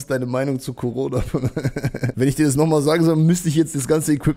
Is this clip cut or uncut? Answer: cut